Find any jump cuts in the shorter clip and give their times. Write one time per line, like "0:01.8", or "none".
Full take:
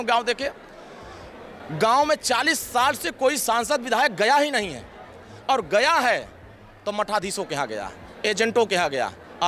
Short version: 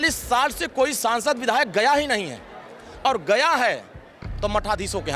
none